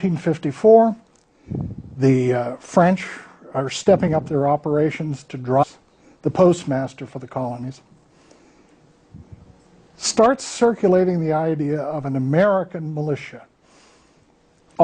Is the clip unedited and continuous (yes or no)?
yes